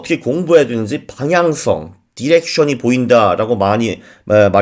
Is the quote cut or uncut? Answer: uncut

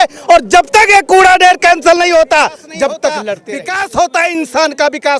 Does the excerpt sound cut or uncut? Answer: cut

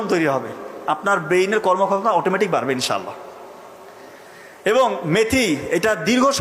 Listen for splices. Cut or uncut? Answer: uncut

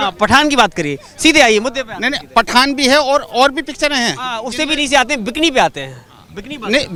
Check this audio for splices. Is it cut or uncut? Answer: uncut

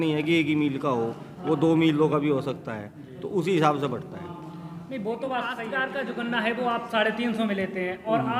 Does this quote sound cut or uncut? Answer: cut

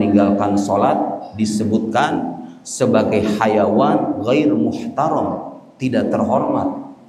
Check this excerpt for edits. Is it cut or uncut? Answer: uncut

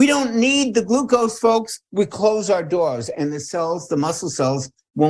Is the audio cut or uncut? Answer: cut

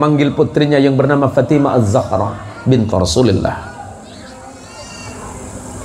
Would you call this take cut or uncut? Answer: uncut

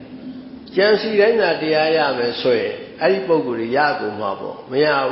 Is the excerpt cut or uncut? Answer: uncut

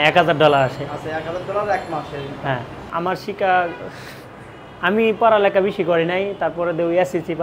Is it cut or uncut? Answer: cut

